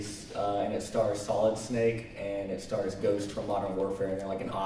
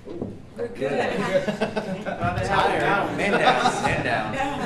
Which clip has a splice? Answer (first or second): second